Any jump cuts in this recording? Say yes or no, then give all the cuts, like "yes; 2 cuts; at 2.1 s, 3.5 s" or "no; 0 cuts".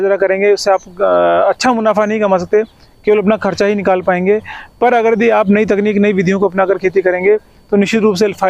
no; 0 cuts